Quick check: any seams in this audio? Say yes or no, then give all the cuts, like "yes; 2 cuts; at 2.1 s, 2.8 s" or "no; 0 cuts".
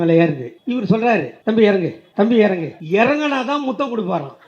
yes; 3 cuts; at 1.0 s, 2.0 s, 2.7 s